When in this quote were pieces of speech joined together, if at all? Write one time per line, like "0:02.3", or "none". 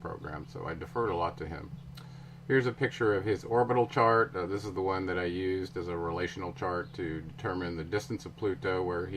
0:02.9